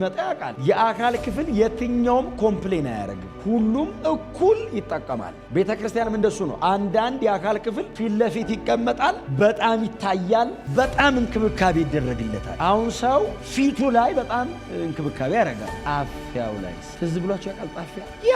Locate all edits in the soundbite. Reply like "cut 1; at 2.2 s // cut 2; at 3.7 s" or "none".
none